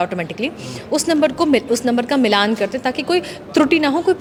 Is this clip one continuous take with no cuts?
yes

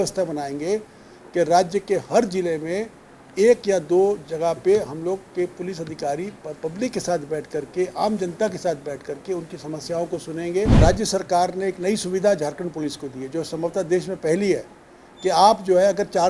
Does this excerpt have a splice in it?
yes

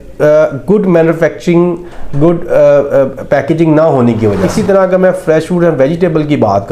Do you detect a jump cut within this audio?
yes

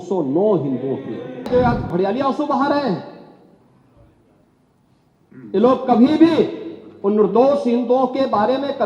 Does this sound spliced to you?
yes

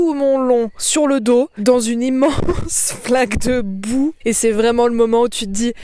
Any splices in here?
yes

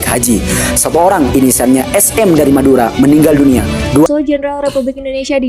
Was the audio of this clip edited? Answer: yes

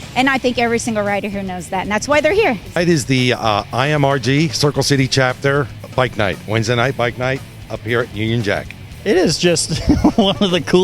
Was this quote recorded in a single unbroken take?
no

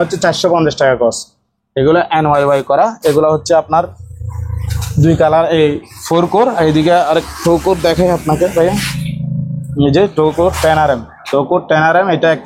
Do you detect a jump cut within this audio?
no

